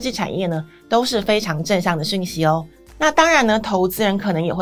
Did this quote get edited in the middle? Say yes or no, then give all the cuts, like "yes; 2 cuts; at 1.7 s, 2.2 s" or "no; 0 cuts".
no; 0 cuts